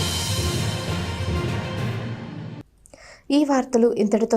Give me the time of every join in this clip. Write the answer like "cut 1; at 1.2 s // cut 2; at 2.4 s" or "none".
none